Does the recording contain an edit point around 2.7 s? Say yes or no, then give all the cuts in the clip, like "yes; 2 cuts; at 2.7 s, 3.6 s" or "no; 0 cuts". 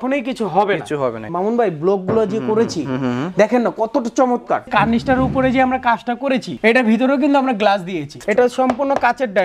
no; 4 cuts; at 1.3 s, 4.7 s, 6.5 s, 8.1 s